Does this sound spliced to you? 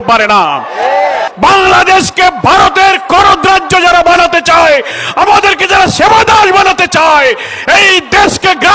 yes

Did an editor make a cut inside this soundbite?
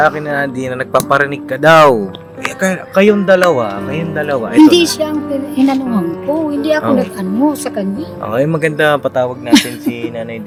no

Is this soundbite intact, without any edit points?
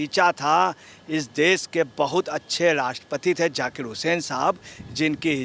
yes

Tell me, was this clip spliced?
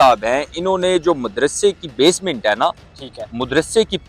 no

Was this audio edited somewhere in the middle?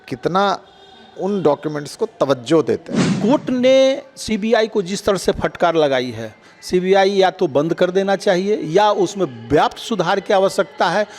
yes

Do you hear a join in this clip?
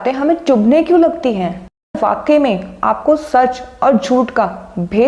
yes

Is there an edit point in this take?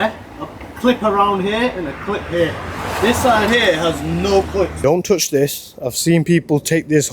yes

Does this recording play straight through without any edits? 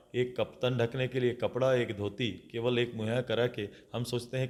yes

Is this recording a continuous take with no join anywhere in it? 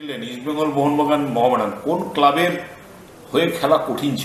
yes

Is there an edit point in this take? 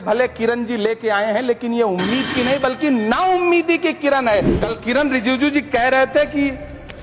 yes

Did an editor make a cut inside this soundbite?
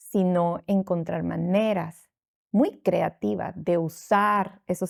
no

